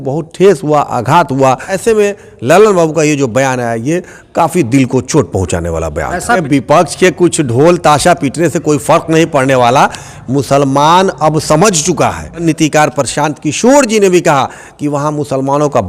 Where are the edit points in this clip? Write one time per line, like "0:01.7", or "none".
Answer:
0:01.7
0:06.4
0:12.4